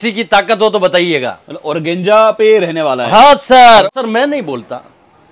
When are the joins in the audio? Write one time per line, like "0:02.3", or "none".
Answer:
0:03.9